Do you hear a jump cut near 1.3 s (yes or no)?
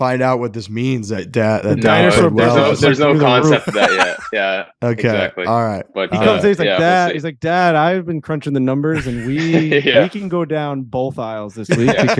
no